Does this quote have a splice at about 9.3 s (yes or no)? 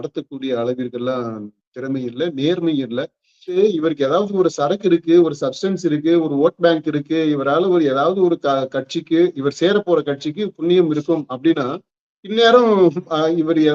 no